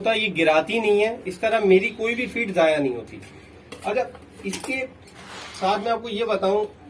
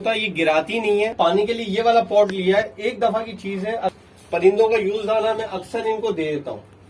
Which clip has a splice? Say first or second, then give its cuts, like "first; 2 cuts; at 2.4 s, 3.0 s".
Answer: second; 2 cuts; at 1.1 s, 3.9 s